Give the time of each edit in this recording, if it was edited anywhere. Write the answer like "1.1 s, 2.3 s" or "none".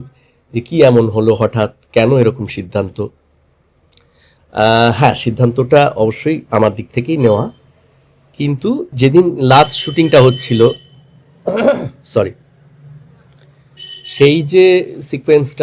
8.9 s